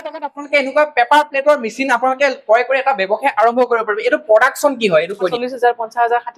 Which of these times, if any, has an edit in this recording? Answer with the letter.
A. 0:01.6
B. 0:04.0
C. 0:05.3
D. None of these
C